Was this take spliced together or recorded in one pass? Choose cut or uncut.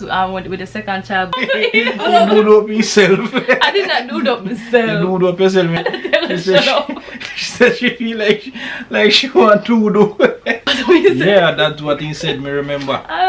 cut